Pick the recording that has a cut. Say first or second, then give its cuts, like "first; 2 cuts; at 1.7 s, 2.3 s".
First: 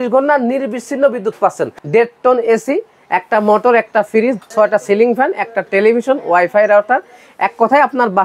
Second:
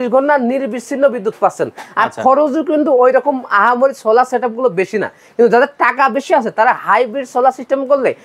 first; 2 cuts; at 1.7 s, 4.5 s